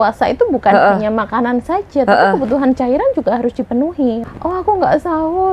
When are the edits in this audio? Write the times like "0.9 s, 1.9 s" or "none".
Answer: 4.2 s